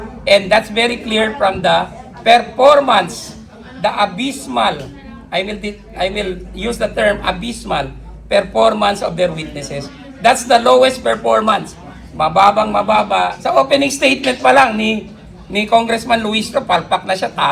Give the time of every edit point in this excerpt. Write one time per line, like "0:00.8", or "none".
0:13.4